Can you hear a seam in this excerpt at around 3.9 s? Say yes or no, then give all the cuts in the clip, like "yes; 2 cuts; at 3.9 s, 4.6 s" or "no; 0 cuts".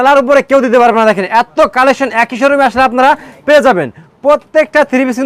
no; 0 cuts